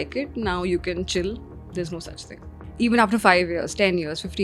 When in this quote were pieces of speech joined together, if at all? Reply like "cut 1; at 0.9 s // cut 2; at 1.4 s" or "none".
cut 1; at 2.6 s